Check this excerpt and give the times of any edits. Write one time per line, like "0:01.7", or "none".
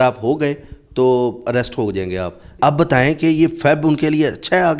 0:02.5